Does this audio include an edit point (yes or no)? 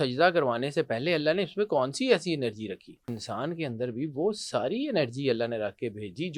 yes